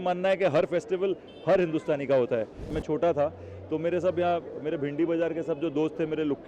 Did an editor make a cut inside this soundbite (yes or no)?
yes